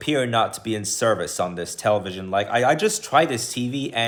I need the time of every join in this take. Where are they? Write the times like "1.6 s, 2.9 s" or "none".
none